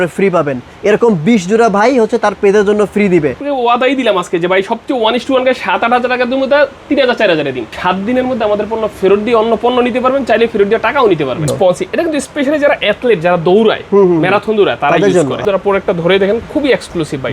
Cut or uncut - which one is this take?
cut